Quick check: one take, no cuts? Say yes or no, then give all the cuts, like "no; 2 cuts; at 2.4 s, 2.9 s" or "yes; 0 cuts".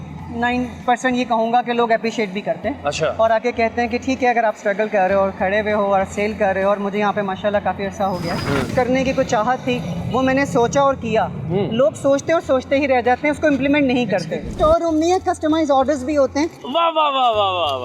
no; 2 cuts; at 8.7 s, 14.6 s